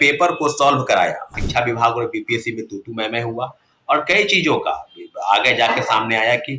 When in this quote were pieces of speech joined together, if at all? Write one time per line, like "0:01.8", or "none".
0:01.3